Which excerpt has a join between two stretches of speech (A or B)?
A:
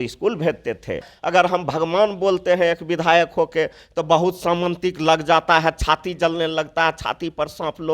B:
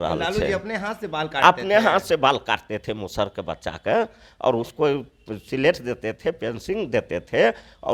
A